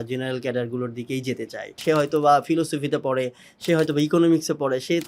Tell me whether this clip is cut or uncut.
cut